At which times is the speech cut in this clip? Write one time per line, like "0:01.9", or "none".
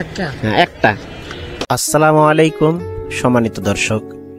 0:01.1